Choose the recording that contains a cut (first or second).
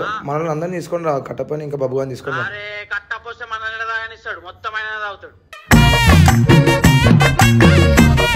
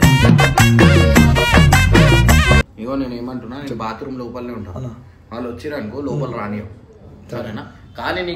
second